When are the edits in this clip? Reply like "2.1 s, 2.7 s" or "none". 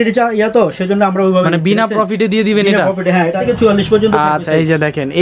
3.3 s